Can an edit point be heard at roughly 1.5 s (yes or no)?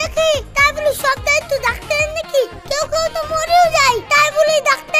no